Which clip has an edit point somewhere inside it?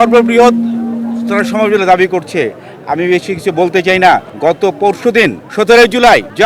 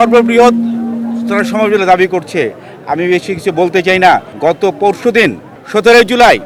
first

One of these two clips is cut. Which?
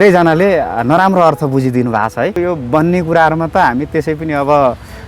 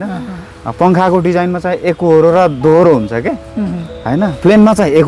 first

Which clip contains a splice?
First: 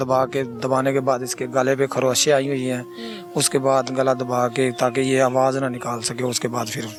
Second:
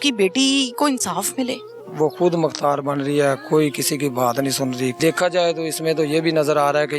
second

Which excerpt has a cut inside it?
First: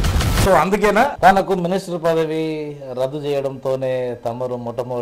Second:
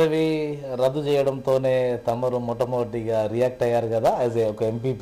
first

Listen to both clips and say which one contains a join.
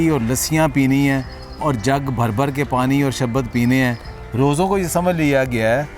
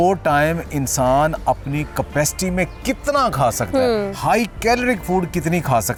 first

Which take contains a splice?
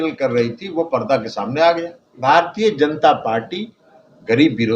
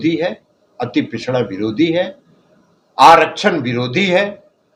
first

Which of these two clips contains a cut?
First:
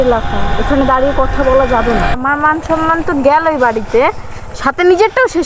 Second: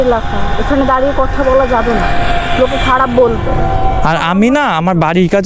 first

